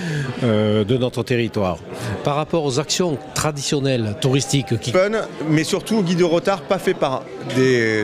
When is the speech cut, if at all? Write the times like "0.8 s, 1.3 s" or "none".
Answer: none